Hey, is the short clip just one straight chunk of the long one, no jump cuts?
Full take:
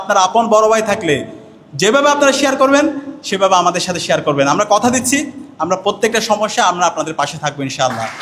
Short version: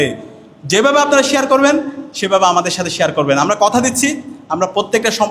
yes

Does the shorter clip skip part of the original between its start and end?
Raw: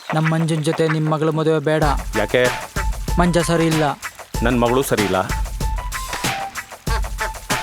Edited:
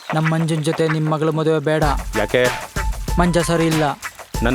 no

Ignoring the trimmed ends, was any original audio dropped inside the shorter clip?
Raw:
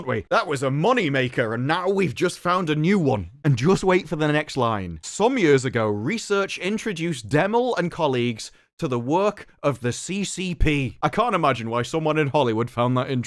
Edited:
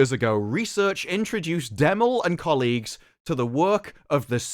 no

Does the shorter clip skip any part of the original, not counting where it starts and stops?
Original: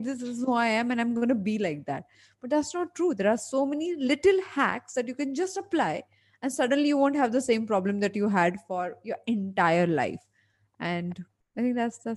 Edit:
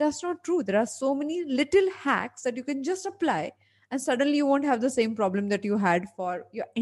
no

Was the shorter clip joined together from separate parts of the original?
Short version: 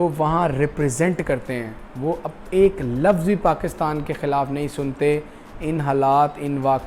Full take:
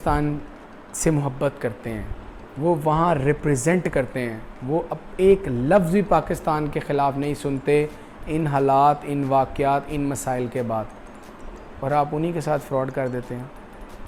no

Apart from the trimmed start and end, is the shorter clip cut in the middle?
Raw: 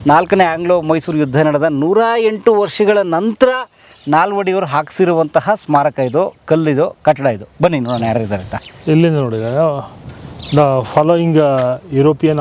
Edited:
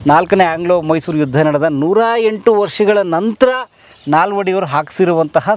no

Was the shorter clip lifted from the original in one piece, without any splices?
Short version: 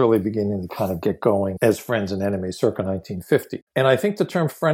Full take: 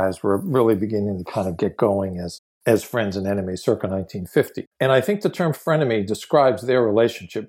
no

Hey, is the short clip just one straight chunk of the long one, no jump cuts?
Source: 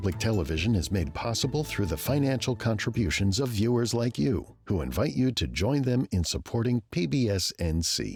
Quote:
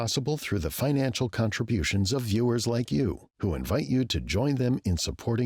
yes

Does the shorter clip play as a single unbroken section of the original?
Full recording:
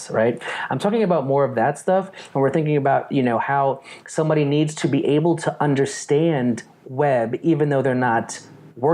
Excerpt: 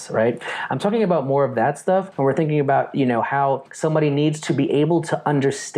no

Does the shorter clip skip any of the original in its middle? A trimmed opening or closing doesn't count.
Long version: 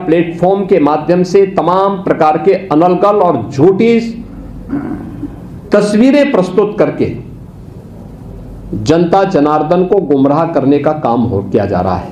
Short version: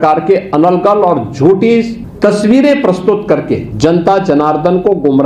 yes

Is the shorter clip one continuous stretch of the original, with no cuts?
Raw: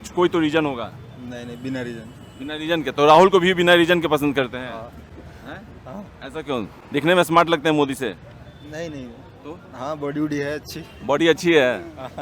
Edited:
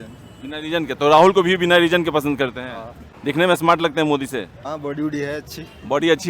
no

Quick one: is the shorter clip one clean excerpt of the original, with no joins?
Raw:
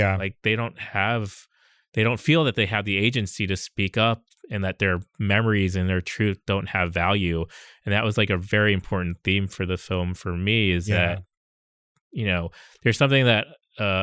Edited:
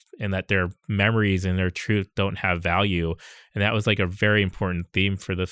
yes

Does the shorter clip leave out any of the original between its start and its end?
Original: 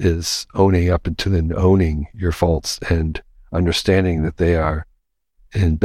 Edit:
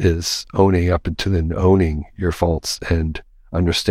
no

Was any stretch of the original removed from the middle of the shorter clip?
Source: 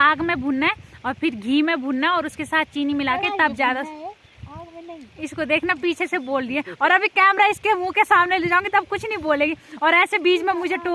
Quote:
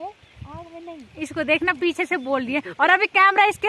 no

